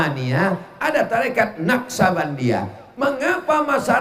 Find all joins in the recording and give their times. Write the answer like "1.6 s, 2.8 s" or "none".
none